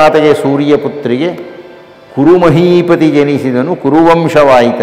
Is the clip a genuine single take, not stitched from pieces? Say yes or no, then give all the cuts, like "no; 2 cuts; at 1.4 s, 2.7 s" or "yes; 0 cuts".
yes; 0 cuts